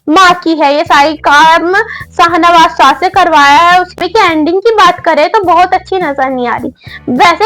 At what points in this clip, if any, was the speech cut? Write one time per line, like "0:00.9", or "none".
0:04.0